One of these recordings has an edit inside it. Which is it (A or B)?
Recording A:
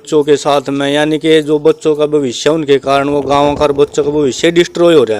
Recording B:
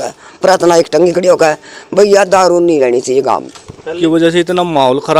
B